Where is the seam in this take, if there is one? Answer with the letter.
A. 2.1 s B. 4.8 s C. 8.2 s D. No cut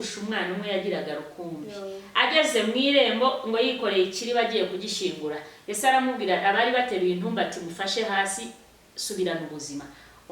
D